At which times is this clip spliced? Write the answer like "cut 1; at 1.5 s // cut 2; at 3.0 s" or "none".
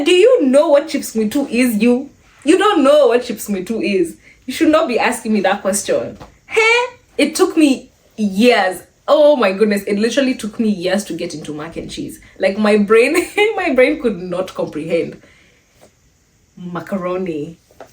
cut 1; at 7.0 s